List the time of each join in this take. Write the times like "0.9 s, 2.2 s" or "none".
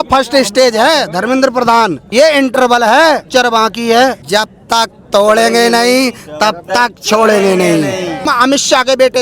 2.0 s, 3.2 s, 4.2 s, 8.3 s